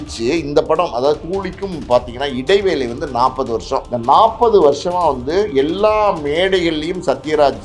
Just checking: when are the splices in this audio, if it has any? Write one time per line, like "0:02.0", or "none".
0:03.9